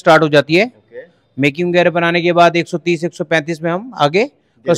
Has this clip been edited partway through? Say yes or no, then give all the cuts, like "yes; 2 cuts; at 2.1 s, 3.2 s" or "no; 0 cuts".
no; 0 cuts